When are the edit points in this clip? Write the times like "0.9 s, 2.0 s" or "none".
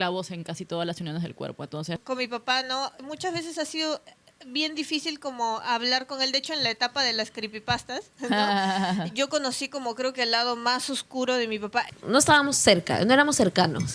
2.0 s, 3.0 s, 11.9 s